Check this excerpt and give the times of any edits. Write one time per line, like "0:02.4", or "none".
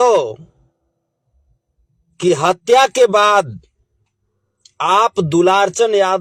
none